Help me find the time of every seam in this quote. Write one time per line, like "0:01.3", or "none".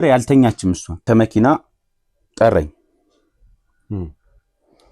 0:00.9